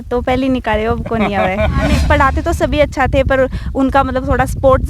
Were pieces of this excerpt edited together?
yes; 1 cut; at 2.0 s

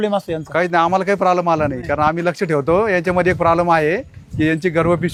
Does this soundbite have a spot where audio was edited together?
no; 0 cuts

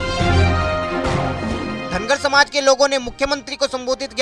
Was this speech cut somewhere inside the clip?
yes; 1 cut; at 1.8 s

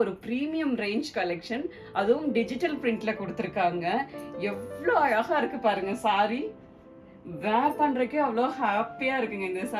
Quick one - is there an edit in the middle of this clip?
no; 0 cuts

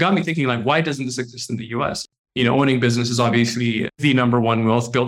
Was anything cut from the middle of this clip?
yes; 2 cuts; at 2.0 s, 4.0 s

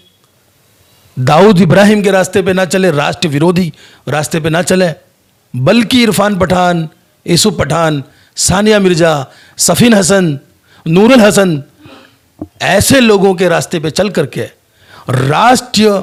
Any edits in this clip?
no; 0 cuts

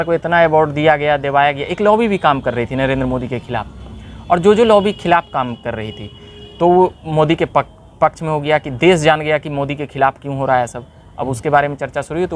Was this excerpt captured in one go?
yes; 0 cuts

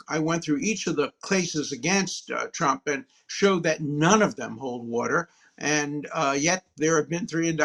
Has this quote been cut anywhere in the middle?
no; 0 cuts

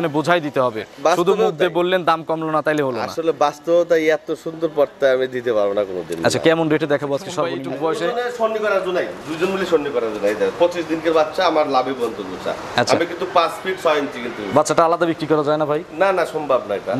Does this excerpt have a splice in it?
yes; 1 cut; at 7.6 s

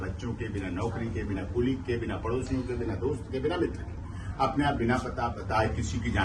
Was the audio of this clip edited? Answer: no; 0 cuts

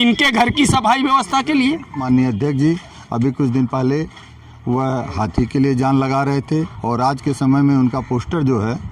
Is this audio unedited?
no; 1 cut; at 2.0 s

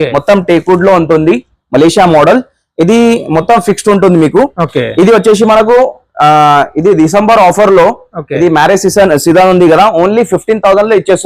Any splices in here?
no; 0 cuts

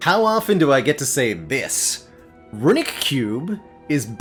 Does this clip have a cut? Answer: no; 0 cuts

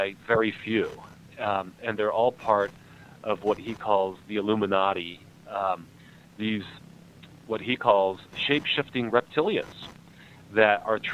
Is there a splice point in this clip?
no; 0 cuts

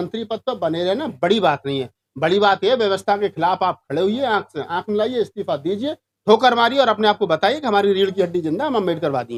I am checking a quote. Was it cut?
no; 0 cuts

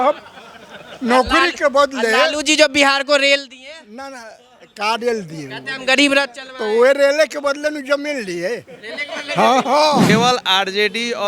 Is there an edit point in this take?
yes; 1 cut; at 10.1 s

